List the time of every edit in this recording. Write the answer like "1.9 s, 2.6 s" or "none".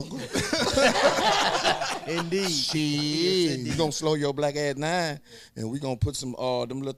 none

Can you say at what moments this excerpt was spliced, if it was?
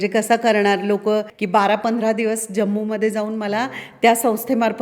1.4 s

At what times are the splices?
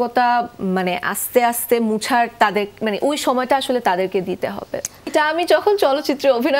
5.1 s

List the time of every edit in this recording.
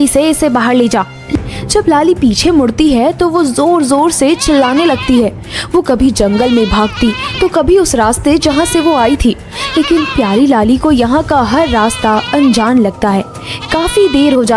1.2 s

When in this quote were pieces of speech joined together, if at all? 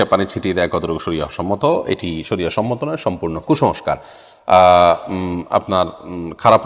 none

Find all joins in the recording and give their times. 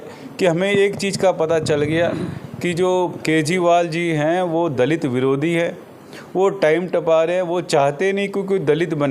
none

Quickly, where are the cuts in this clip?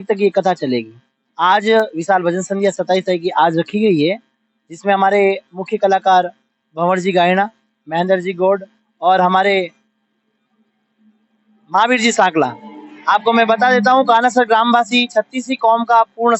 none

